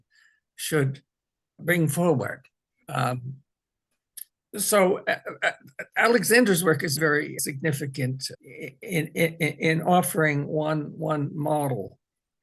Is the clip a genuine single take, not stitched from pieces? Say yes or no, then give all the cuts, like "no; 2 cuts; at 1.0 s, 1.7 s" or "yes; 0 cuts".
yes; 0 cuts